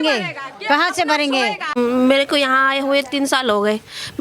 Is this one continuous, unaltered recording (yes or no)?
no